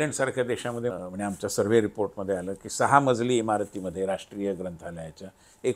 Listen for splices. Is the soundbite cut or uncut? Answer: cut